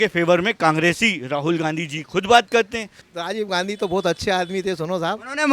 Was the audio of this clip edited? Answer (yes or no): yes